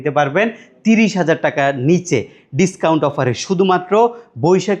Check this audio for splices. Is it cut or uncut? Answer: uncut